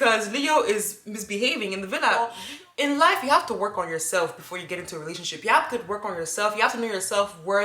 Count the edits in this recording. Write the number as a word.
one